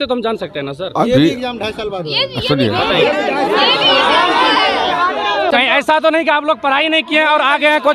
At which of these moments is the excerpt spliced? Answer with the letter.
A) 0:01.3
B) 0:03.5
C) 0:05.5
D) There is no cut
C